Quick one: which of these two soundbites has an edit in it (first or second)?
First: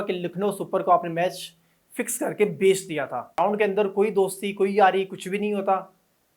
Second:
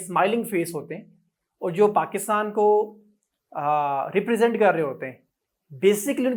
first